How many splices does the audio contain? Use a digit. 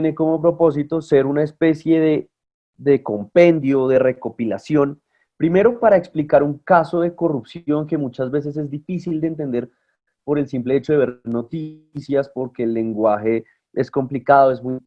0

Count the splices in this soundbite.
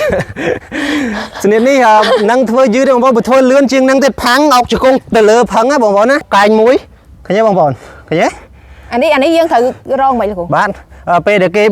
1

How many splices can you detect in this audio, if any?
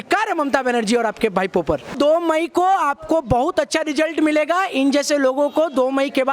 1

